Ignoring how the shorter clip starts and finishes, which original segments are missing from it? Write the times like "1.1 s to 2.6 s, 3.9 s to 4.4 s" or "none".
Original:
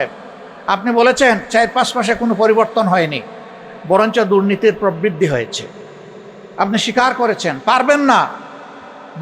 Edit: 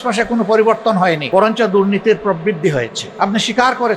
3.1 s to 3.8 s, 5.6 s to 6.4 s